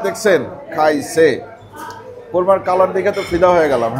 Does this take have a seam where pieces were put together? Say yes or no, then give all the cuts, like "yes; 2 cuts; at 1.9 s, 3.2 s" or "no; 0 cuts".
no; 0 cuts